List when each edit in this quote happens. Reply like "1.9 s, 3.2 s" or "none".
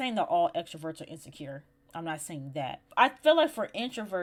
none